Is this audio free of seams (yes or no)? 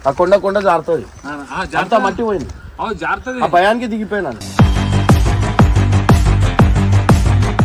yes